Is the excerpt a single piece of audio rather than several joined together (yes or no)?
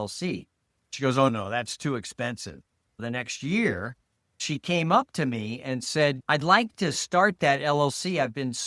no